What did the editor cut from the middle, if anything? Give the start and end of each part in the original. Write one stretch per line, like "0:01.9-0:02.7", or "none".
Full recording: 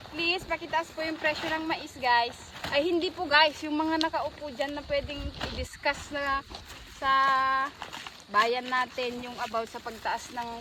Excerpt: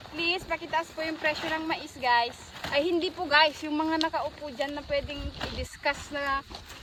none

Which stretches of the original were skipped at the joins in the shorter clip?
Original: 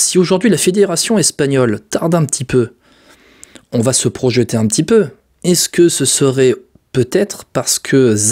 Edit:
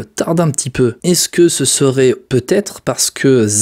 0:02.7-0:05.4
0:07.0-0:07.2

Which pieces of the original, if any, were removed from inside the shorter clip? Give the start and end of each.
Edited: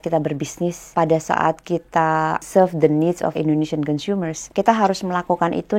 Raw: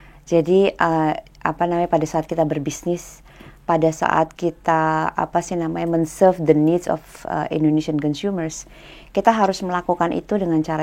0:03.1-0:03.5
0:05.2-0:06.1
0:07.0-0:07.5
0:08.6-0:09.0

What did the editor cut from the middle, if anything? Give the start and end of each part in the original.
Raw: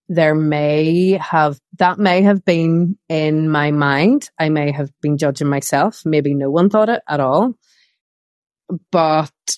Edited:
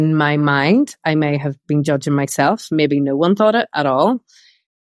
none

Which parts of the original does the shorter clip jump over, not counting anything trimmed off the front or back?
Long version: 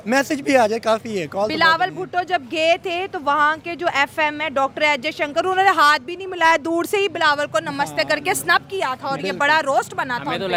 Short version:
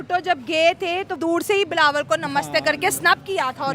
0:03.2-0:06.6

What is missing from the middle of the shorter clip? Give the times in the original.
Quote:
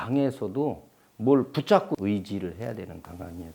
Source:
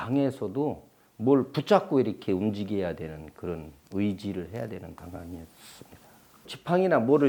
0:01.9-0:03.9

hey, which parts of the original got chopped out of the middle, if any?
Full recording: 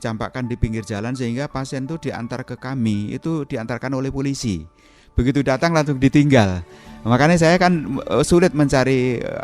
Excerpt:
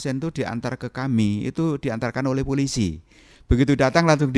none

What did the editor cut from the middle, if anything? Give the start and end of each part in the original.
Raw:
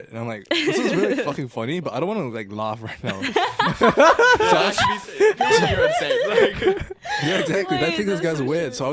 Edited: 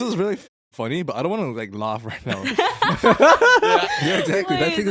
0:04.6-0:07.0

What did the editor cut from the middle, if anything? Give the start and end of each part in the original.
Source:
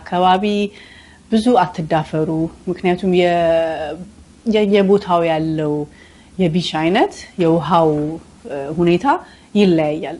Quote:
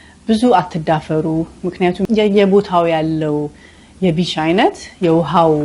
0:03.0-0:04.4

